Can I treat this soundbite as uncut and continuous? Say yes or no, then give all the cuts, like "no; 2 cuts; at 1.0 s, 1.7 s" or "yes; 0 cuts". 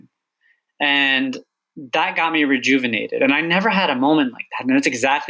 yes; 0 cuts